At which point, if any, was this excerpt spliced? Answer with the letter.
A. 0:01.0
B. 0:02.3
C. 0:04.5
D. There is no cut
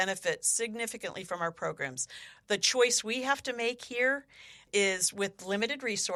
D